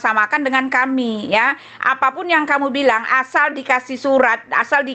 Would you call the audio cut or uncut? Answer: uncut